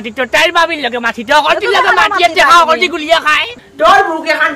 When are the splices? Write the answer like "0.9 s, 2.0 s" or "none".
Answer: 3.5 s